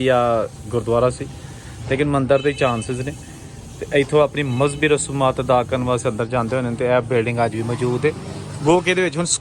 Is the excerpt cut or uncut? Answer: uncut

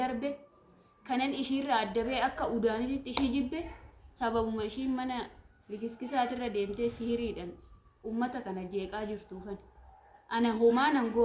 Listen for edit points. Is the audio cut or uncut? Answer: uncut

